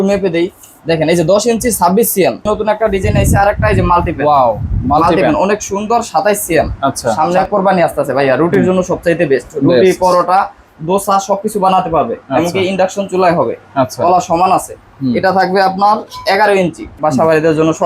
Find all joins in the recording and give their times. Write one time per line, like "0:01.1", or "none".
0:02.5
0:07.2
0:17.0